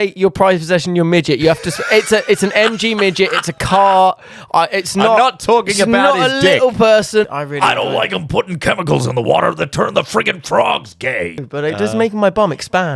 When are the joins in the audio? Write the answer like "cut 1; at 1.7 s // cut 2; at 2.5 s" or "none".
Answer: cut 1; at 7.3 s // cut 2; at 11.5 s